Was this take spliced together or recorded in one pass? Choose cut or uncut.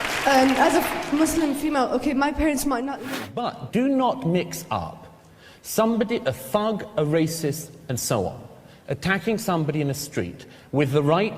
cut